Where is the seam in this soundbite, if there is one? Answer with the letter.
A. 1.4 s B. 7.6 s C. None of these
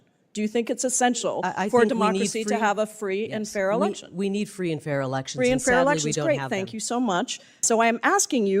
B